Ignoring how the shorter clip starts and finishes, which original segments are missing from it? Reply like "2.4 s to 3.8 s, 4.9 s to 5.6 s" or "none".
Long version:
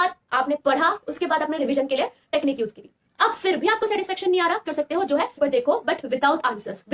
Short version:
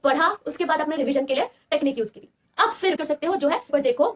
3.6 s to 4.6 s